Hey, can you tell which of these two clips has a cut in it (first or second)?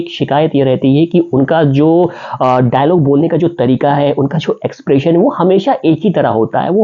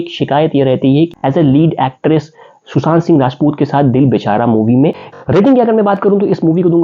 second